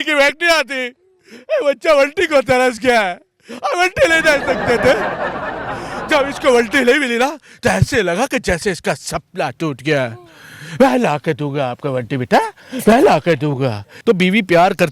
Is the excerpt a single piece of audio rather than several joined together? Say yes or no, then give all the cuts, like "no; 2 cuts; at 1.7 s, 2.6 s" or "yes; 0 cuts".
no; 1 cut; at 13.8 s